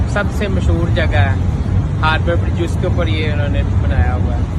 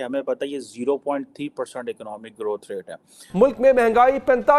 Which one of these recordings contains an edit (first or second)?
second